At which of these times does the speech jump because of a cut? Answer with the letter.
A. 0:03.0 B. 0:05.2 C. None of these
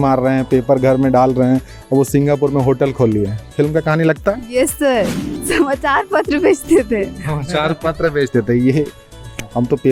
B